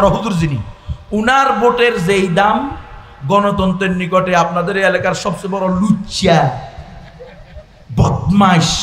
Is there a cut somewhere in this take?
no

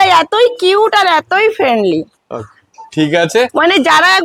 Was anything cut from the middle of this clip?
no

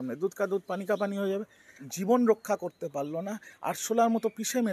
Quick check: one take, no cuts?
no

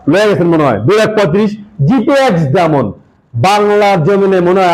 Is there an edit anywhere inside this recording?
no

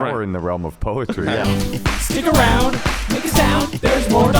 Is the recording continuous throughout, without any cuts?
no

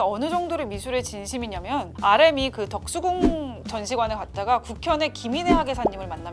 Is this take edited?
yes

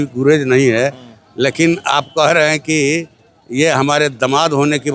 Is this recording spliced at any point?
no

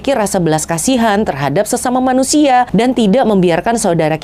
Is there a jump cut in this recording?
no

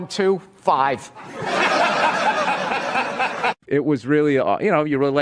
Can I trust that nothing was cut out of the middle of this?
no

